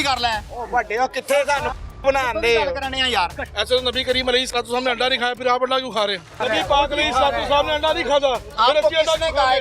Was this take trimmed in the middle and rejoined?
yes; 2 cuts; at 3.5 s, 6.4 s

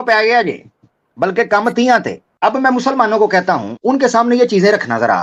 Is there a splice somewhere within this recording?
yes; 2 cuts; at 2.2 s, 3.7 s

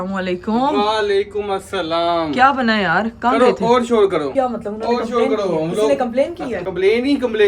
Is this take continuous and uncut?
no; 2 cuts; at 4.3 s, 6.6 s

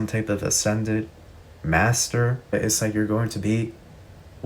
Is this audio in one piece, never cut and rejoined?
no; 1 cut; at 2.5 s

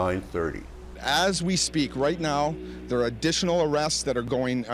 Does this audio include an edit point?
yes; 1 cut; at 1.0 s

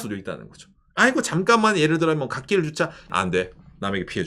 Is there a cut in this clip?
yes; 1 cut; at 3.1 s

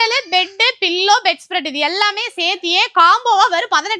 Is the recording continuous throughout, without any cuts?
yes; 0 cuts

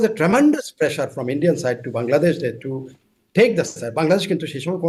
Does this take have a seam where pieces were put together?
no; 0 cuts

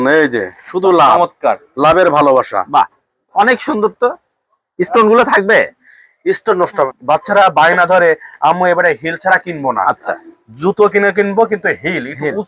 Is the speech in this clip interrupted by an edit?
yes; 1 cut; at 6.9 s

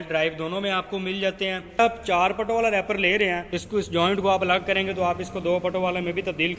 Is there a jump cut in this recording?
yes; 2 cuts; at 1.8 s, 3.5 s

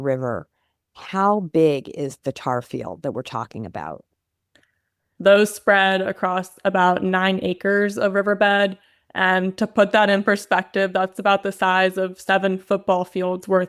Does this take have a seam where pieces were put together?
no; 0 cuts

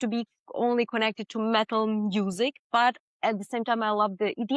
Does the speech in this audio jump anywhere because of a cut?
no; 0 cuts

